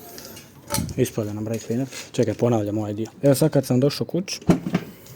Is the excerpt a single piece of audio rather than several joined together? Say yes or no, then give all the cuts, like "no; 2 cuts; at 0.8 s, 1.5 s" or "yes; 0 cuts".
no; 2 cuts; at 2.0 s, 3.1 s